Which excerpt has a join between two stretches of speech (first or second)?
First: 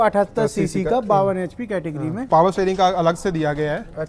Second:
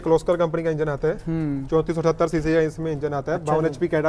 first